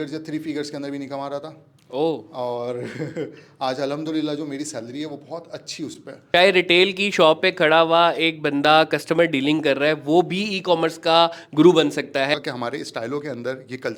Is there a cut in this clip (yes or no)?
yes